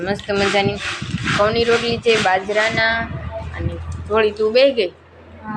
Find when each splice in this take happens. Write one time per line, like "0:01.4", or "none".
none

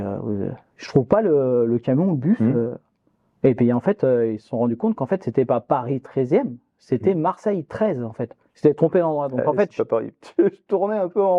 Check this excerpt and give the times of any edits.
none

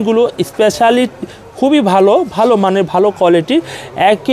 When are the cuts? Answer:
none

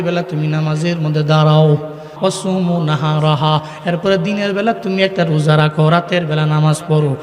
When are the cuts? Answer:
0:02.1

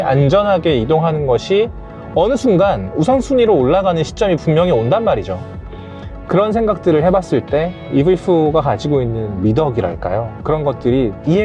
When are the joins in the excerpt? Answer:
0:07.8
0:10.3

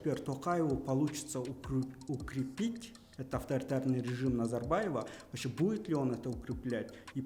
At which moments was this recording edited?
none

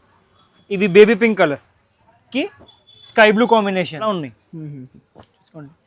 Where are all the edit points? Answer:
0:04.1

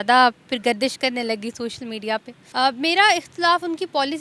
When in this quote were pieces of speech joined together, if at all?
0:02.4

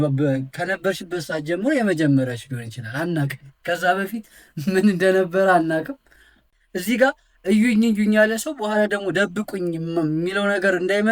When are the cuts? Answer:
0:06.5

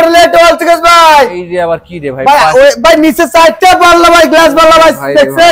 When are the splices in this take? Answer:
none

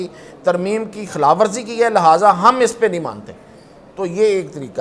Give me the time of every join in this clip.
none

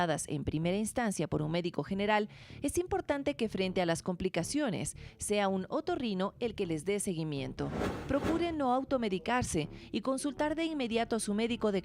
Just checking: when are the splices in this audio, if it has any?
0:07.9

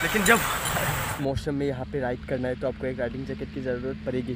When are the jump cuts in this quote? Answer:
0:01.1

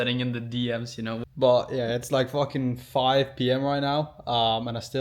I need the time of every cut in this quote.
none

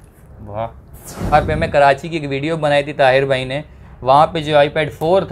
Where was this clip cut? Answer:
0:01.3

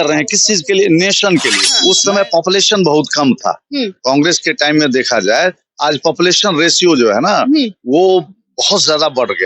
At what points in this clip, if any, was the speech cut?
0:01.5

